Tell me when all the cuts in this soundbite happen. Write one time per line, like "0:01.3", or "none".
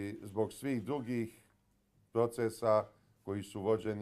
0:02.5